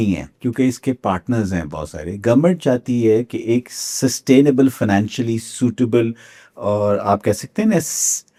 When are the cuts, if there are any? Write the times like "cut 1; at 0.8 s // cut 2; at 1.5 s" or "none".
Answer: none